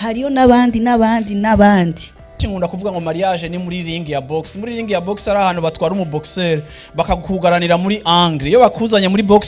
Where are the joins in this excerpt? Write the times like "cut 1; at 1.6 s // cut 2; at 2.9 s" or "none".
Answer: cut 1; at 2.5 s